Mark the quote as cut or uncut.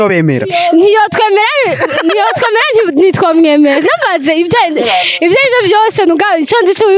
uncut